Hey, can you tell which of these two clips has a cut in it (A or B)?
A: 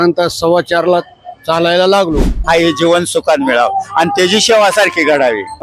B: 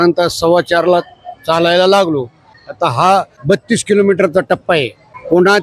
A